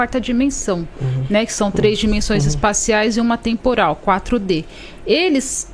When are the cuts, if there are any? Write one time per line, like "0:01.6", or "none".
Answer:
none